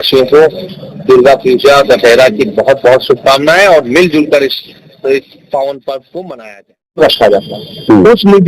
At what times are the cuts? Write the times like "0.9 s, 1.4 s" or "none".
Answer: 7.0 s